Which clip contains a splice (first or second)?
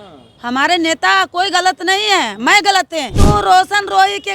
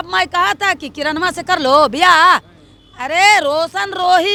first